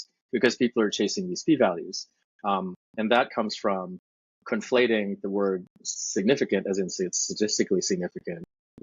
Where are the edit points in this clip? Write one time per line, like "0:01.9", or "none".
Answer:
none